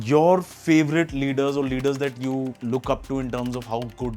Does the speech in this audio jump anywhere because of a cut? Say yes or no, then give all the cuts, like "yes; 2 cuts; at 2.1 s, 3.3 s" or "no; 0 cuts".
yes; 1 cut; at 2.6 s